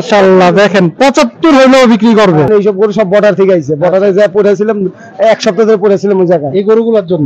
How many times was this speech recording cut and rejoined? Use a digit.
1